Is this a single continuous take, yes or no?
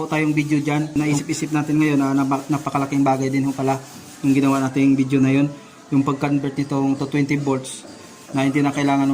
no